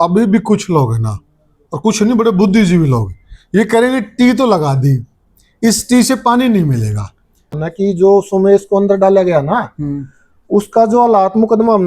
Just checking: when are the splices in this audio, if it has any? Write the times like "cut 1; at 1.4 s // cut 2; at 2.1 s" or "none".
cut 1; at 7.5 s